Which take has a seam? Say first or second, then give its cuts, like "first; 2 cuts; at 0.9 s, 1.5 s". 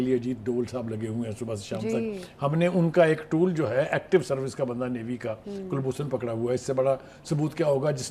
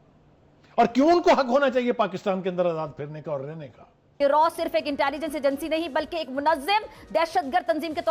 second; 1 cut; at 4.1 s